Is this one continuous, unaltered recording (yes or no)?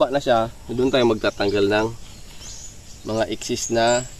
yes